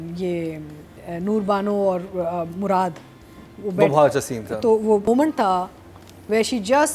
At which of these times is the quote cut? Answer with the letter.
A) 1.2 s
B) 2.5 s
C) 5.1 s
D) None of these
C